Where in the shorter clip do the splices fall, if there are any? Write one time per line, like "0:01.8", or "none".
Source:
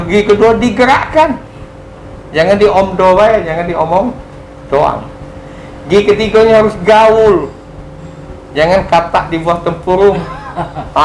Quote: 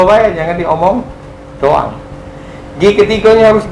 none

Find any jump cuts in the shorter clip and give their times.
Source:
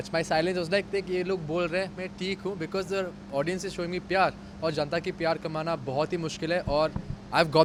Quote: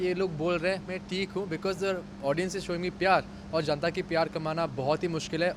none

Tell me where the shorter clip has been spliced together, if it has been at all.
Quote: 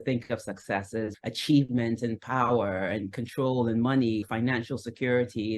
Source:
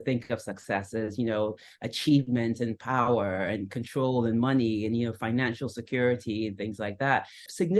0:01.1
0:04.2

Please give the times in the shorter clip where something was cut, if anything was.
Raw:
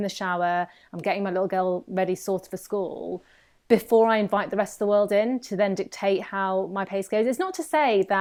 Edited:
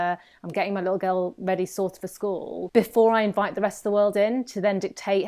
0:02.7

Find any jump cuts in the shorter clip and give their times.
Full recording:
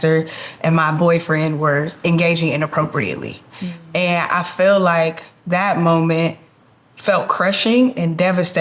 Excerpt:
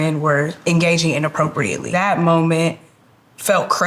0:01.8

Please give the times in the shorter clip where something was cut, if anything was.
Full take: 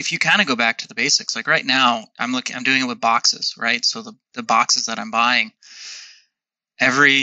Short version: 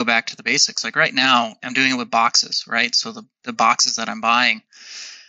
0:01.6

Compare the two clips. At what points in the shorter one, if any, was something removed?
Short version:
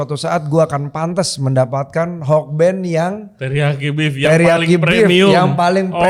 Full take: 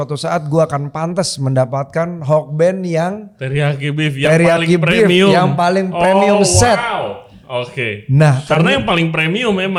none

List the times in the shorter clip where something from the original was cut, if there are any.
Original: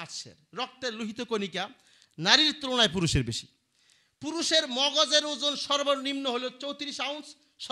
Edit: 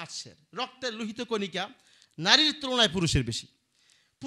none

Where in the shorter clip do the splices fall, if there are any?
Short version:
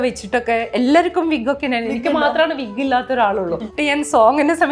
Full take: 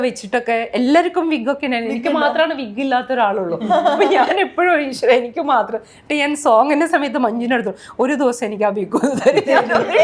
0:03.6

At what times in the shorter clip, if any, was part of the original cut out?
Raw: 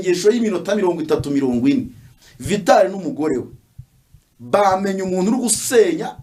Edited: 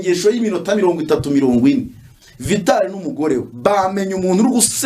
0:03.5

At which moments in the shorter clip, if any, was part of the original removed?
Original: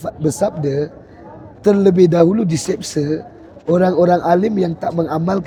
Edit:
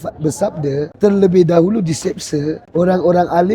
0:00.9
0:02.6

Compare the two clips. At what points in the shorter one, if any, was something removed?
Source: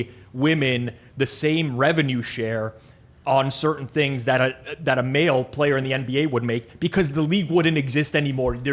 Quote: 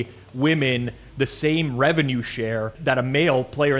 0:02.7

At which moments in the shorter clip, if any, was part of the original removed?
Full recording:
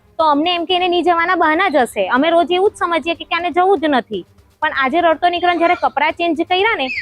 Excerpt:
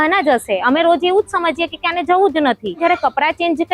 0:02.8

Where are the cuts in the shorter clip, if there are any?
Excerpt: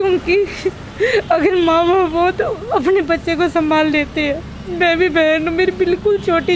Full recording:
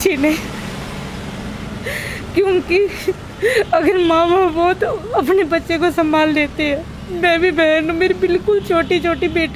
none

